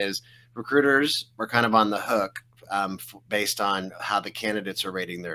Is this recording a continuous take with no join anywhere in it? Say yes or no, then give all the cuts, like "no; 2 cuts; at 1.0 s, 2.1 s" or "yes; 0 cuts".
yes; 0 cuts